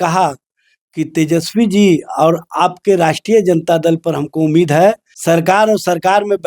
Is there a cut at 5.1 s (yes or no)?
yes